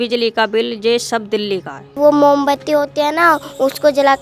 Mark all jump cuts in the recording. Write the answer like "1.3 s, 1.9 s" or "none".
1.9 s